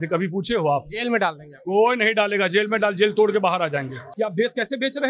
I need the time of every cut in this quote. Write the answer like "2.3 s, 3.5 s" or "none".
4.0 s